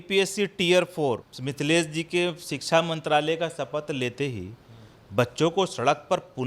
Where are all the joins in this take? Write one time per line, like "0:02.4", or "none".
0:01.4